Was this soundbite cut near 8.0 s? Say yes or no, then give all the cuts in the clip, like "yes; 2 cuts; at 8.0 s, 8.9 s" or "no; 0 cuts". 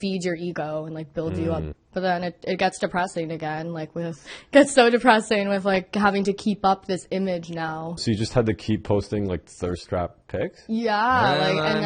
yes; 3 cuts; at 1.7 s, 4.3 s, 8.0 s